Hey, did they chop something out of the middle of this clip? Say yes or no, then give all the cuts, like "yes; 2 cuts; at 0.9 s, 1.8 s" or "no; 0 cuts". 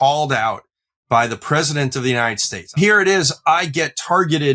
yes; 1 cut; at 2.7 s